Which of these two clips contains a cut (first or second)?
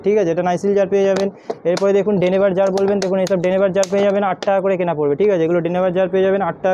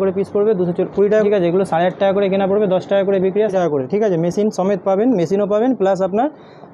second